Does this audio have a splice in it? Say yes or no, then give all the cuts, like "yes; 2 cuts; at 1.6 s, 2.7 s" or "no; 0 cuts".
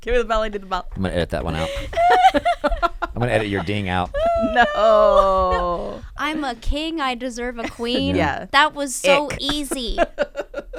no; 0 cuts